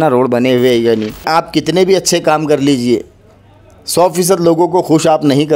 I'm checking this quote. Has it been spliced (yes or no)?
yes